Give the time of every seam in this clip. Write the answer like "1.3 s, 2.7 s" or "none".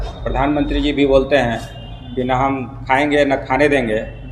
none

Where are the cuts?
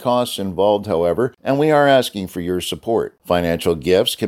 1.4 s

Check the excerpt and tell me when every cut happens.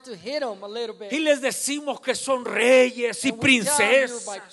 none

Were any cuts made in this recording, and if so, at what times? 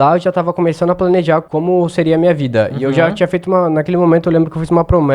1.5 s

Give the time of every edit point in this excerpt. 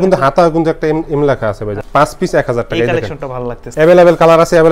1.8 s, 3.6 s

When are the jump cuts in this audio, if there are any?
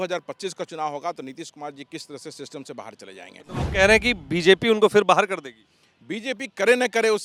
none

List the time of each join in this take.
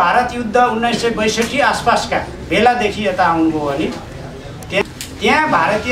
5.0 s

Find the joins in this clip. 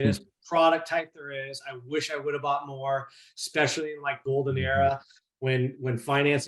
4.1 s

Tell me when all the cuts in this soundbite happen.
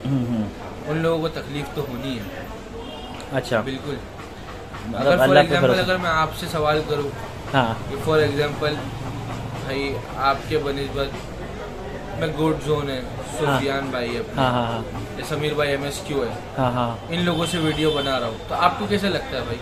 none

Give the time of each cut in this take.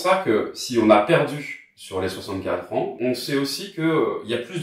2.9 s

